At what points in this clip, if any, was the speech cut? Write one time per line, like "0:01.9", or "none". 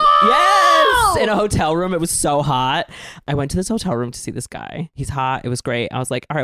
0:03.3
0:05.0